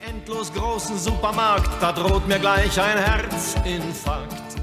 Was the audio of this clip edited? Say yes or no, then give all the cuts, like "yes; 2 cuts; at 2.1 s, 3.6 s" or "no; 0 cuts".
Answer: no; 0 cuts